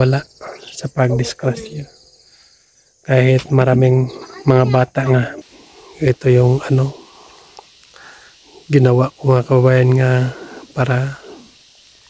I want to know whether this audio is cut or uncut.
cut